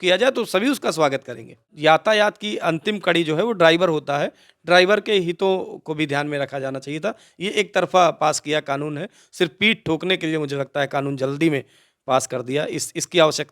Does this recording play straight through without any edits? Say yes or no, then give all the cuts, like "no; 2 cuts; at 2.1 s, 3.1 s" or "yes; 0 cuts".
no; 1 cut; at 1.7 s